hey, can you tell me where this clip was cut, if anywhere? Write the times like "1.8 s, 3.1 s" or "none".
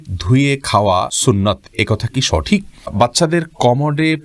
1.1 s, 2.9 s